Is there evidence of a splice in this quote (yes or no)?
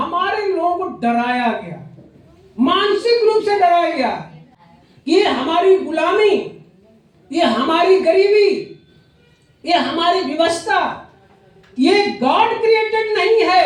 no